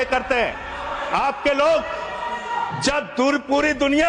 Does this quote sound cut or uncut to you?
uncut